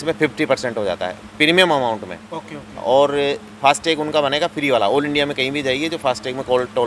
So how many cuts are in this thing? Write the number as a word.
zero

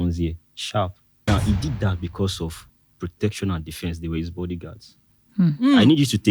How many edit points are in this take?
one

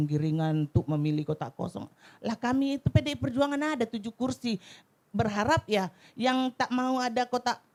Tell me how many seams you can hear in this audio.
zero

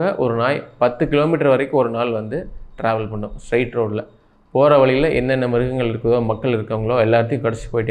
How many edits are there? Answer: zero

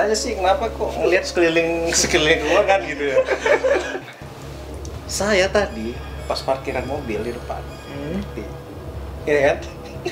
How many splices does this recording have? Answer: one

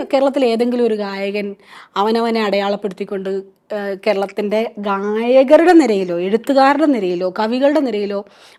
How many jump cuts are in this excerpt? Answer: zero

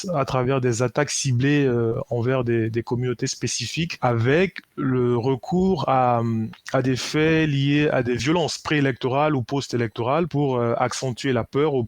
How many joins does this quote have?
three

